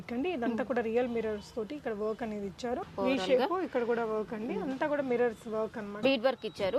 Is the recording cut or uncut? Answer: cut